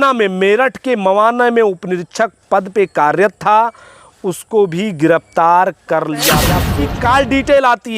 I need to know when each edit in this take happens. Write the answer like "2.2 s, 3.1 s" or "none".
6.6 s